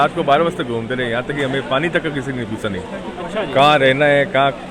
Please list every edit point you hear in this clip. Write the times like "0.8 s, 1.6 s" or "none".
none